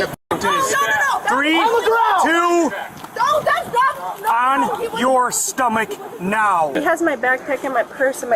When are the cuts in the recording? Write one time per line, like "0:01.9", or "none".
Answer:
0:06.7